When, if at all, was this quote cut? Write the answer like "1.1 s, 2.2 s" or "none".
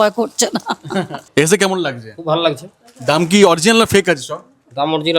1.2 s